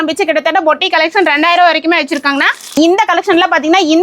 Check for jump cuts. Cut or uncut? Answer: cut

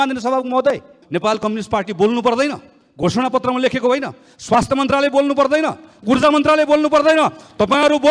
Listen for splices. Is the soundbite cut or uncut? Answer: cut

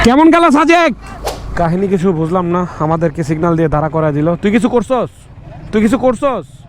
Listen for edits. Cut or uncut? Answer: cut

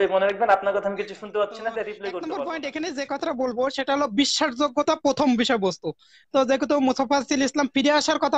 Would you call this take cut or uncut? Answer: cut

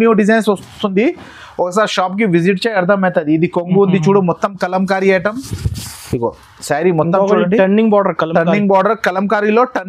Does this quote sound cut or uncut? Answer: uncut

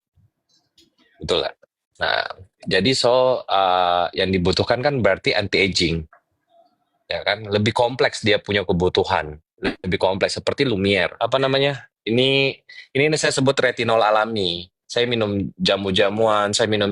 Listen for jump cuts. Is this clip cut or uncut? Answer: cut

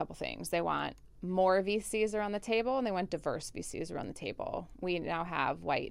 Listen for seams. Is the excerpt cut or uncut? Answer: uncut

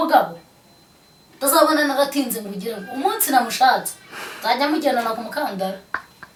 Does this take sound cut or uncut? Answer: uncut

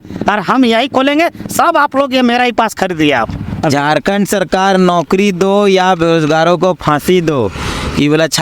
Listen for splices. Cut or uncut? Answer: cut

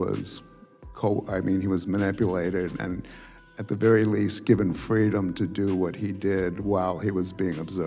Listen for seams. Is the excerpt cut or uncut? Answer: uncut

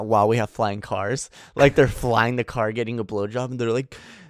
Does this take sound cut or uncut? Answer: uncut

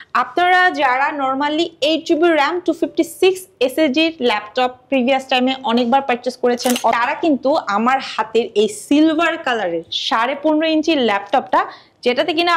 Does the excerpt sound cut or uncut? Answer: cut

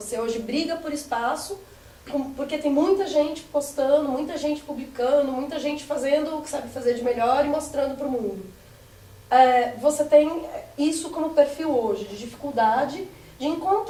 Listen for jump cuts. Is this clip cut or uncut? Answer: uncut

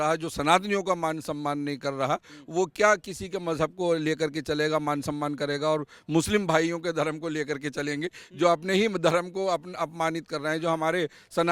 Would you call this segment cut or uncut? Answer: uncut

